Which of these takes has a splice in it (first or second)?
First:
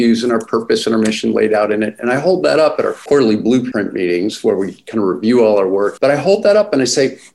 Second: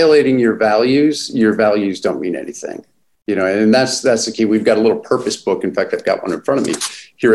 first